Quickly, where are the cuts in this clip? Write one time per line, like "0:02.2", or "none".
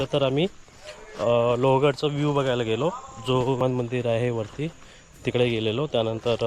0:03.6